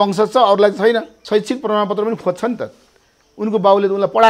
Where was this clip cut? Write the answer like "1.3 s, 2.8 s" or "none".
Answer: 1.1 s